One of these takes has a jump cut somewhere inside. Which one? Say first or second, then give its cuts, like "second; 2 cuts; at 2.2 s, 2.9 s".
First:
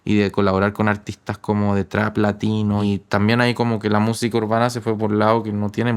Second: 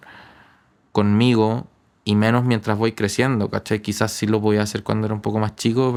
first; 1 cut; at 2.8 s